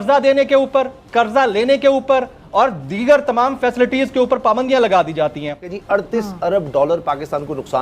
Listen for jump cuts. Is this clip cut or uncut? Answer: cut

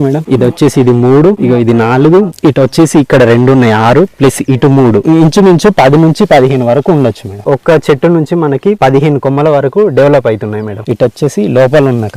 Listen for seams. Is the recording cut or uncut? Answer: uncut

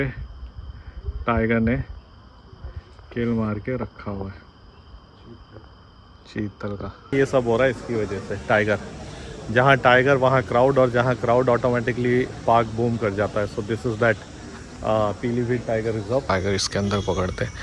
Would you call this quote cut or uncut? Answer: cut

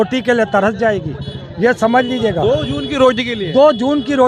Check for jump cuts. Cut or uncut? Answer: uncut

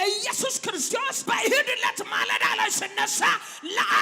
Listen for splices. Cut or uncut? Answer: cut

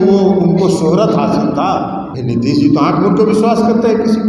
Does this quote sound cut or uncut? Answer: cut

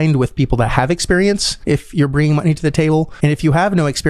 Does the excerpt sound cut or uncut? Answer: cut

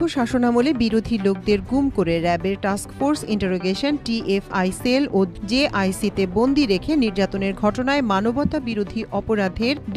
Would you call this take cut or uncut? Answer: cut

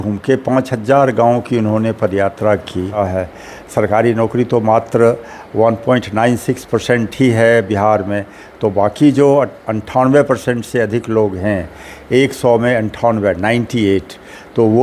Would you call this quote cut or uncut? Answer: cut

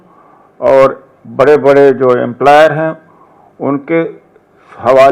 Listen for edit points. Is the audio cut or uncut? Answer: uncut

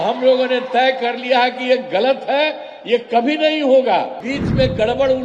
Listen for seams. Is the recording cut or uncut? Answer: cut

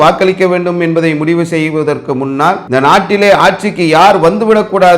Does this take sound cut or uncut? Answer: cut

